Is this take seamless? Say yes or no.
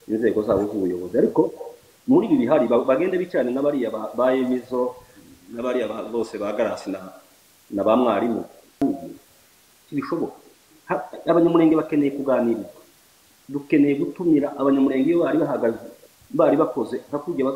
no